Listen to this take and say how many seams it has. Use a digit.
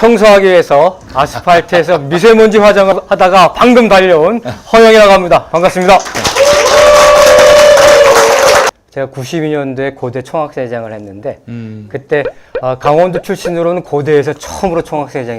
2